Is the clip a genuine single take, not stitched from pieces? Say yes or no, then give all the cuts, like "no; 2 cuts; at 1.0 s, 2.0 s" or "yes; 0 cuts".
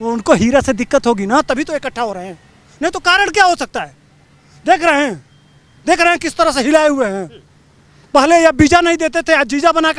yes; 0 cuts